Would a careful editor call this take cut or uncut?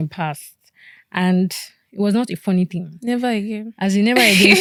uncut